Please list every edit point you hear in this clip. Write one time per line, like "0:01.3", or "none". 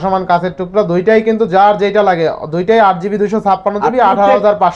none